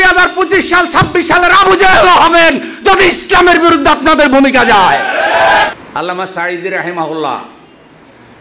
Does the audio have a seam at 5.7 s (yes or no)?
yes